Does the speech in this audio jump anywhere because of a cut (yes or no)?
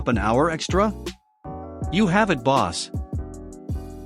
no